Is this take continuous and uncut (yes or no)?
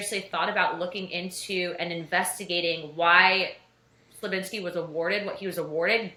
yes